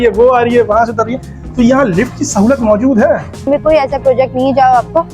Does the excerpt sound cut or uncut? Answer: cut